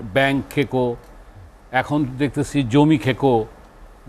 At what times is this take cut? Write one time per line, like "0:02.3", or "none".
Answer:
none

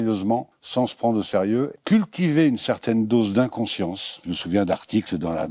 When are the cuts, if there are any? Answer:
0:01.8
0:04.3

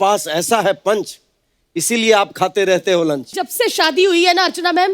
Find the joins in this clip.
0:03.4

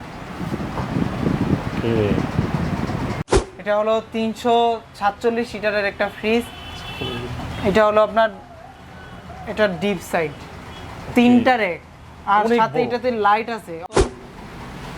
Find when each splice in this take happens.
0:03.3
0:14.1

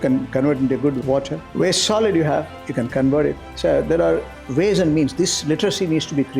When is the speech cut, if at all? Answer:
0:03.5
0:04.4

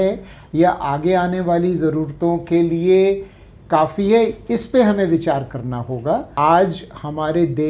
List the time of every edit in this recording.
0:06.3

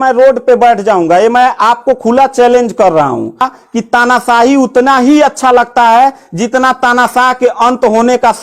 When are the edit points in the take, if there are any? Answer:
0:03.6

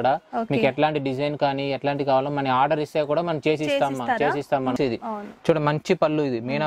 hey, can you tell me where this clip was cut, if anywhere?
0:04.8

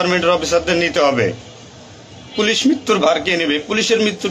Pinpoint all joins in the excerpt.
0:02.3

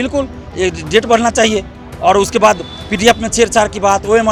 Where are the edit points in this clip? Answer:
none

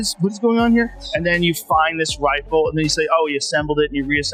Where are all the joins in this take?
none

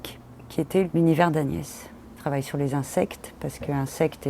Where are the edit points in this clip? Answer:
0:00.9
0:02.1

